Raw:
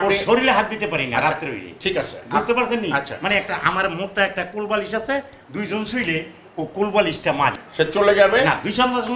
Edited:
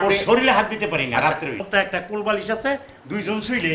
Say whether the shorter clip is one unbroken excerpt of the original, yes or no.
no